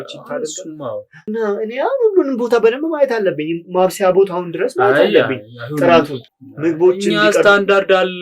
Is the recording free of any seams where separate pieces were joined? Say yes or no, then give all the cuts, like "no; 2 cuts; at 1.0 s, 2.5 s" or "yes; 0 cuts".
no; 2 cuts; at 1.2 s, 6.2 s